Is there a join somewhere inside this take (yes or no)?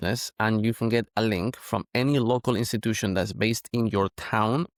no